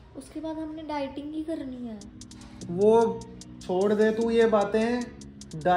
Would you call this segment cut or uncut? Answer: uncut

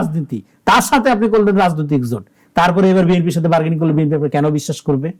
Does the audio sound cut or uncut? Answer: uncut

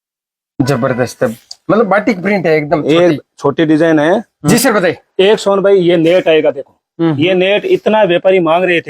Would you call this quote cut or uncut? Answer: cut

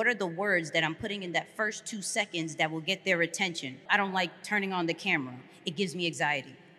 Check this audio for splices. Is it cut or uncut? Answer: cut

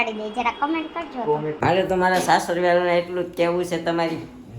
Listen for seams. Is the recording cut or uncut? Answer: cut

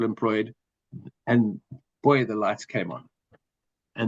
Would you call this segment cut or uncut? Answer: uncut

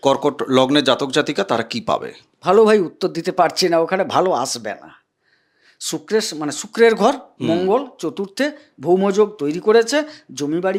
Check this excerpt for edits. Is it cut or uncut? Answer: uncut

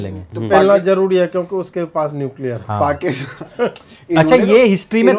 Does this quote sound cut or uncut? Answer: uncut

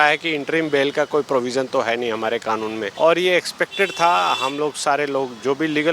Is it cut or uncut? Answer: cut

